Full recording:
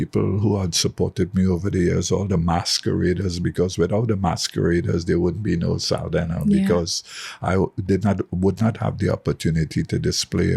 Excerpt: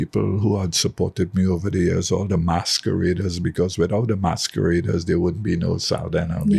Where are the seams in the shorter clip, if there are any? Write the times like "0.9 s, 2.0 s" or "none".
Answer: none